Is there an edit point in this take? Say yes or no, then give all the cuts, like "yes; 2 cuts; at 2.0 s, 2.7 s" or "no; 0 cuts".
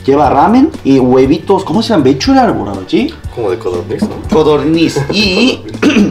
no; 0 cuts